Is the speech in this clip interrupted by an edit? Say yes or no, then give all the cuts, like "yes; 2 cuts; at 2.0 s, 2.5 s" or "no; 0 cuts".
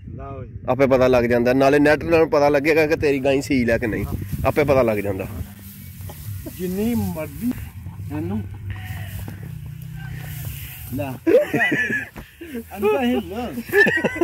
no; 0 cuts